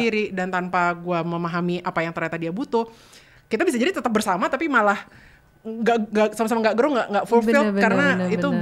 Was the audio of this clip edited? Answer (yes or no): no